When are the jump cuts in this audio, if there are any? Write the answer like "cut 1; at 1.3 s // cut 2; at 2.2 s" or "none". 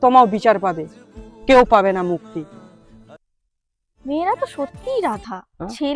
cut 1; at 3.9 s

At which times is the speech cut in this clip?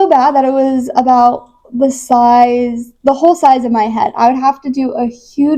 none

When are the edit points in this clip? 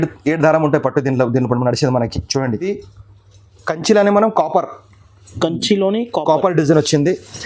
cut 1; at 2.7 s

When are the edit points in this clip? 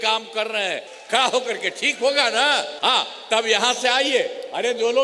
cut 1; at 0.9 s // cut 2; at 2.7 s

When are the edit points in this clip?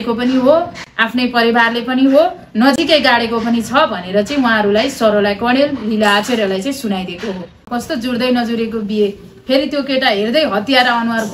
cut 1; at 7.7 s

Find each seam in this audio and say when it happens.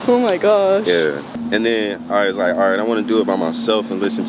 cut 1; at 1.3 s

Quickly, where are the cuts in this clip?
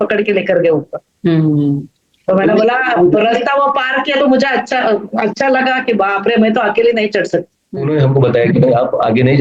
cut 1; at 7.9 s

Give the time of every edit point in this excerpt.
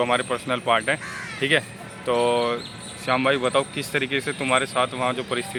none

